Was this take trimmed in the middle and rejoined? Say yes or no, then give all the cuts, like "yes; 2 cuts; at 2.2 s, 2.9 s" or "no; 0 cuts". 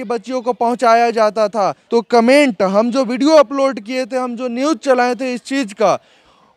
no; 0 cuts